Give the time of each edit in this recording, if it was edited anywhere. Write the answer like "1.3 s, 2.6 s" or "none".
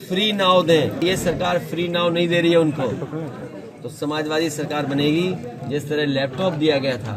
1.0 s